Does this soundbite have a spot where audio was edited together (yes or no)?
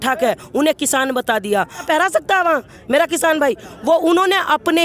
yes